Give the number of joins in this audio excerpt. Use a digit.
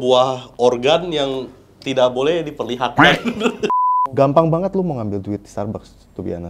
1